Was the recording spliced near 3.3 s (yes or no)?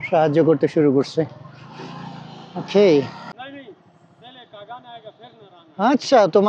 yes